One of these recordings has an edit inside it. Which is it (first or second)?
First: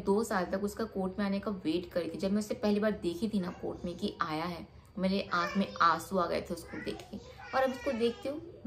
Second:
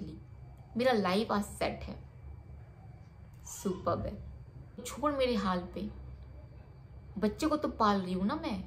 second